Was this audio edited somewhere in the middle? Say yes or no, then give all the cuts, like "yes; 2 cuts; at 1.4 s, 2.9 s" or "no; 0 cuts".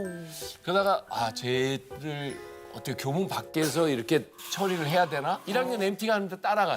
yes; 1 cut; at 5.4 s